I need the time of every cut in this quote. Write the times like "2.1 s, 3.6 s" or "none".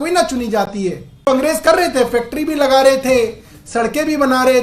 1.3 s

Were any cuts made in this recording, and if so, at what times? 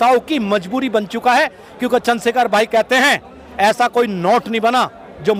none

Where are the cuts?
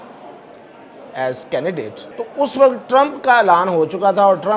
2.0 s

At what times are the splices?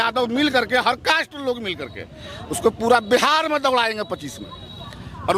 none

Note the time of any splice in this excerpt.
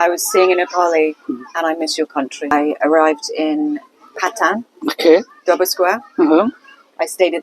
2.5 s

